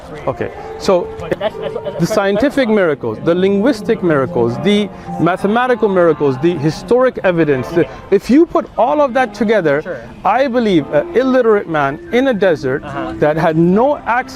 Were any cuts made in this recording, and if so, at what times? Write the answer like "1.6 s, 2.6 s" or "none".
1.4 s